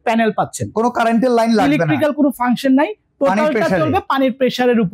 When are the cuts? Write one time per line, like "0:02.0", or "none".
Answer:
none